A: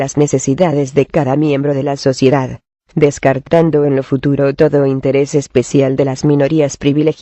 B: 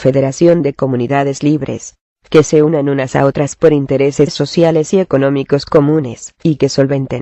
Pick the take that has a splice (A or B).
A